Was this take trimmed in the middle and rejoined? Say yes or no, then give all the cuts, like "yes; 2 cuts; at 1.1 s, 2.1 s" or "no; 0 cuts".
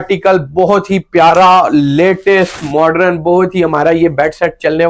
no; 0 cuts